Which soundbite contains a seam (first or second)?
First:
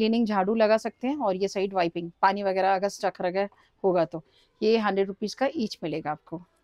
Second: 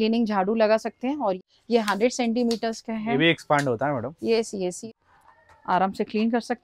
second